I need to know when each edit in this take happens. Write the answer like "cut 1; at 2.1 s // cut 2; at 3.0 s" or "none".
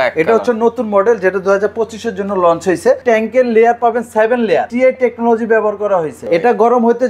cut 1; at 3.0 s // cut 2; at 4.7 s // cut 3; at 6.2 s